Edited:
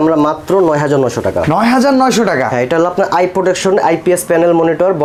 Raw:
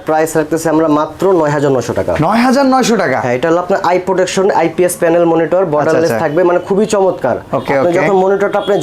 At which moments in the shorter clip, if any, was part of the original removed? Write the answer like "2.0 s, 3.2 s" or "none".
none

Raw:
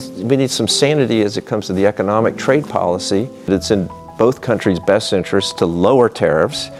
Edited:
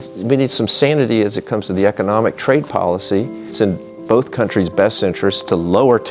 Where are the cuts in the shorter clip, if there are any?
3.5 s

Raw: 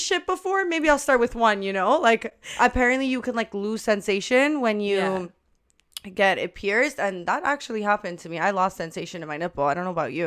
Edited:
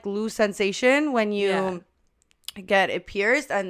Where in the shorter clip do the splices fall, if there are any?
none

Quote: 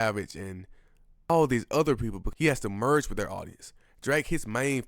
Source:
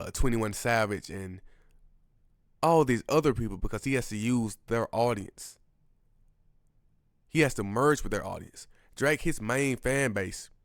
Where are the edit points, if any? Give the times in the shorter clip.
1.3 s, 2.2 s

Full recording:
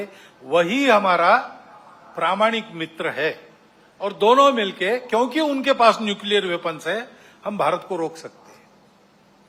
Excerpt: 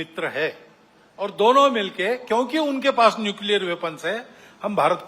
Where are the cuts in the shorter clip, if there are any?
none

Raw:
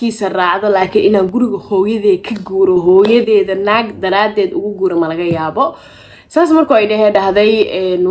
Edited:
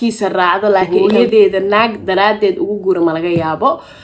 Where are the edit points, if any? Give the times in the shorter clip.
0.9 s

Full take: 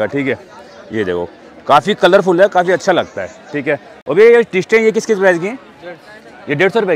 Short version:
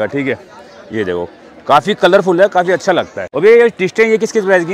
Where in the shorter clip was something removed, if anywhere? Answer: 3.2 s

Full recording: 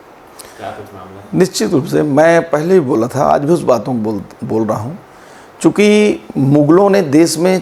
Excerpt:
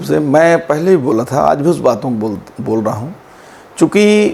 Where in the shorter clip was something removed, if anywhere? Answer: none

